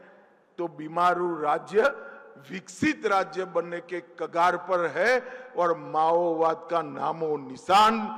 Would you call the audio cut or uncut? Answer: uncut